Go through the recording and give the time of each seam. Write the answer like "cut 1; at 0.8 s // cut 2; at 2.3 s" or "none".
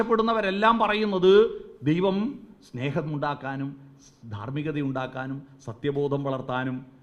none